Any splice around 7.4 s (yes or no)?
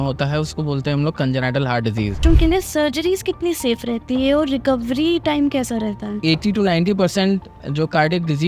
no